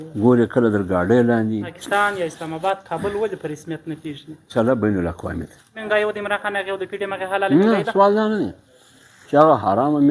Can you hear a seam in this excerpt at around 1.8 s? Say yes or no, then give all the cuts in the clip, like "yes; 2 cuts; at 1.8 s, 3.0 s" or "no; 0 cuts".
yes; 3 cuts; at 1.8 s, 4.5 s, 5.8 s